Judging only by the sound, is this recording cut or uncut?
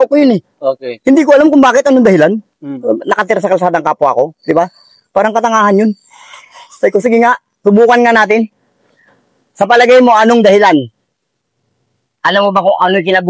uncut